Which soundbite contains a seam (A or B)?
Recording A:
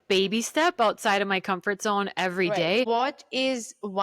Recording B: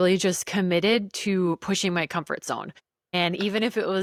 A